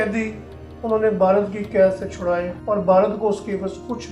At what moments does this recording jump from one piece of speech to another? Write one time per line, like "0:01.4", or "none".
0:02.5